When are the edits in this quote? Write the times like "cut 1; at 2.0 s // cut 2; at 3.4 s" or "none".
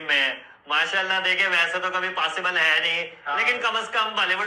none